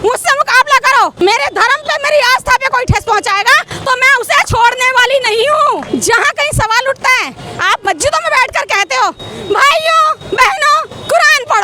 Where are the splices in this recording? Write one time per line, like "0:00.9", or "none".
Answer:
0:01.1
0:05.8